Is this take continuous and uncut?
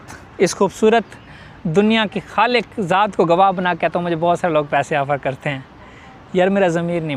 yes; 0 cuts

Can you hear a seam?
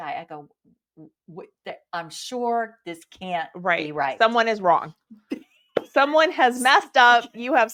no; 0 cuts

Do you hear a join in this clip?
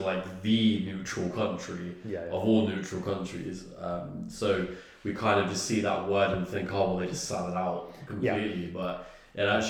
no; 0 cuts

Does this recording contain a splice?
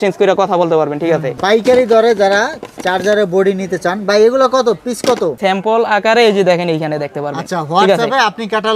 yes; 2 cuts; at 1.3 s, 5.4 s

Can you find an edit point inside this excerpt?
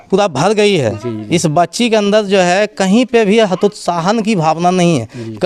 no; 0 cuts

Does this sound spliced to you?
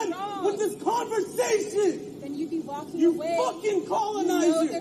no; 0 cuts

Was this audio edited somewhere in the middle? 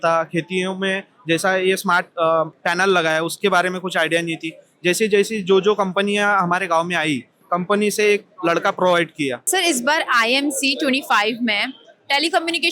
yes; 3 cuts; at 2.6 s, 7.4 s, 9.5 s

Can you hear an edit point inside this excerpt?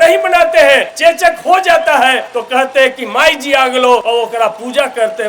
yes; 3 cuts; at 0.9 s, 2.3 s, 4.0 s

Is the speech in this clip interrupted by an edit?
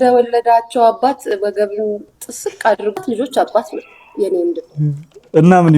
yes; 1 cut; at 3.0 s

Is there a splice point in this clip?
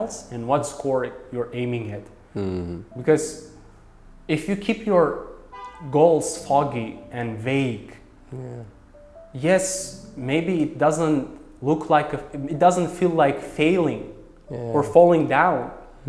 no; 0 cuts

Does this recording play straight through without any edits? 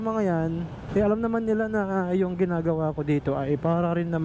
yes; 0 cuts

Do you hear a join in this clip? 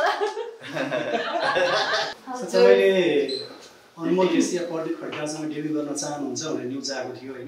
yes; 1 cut; at 2.1 s

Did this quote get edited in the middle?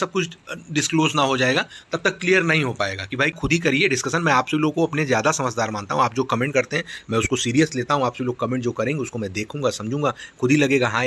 yes; 1 cut; at 3.4 s

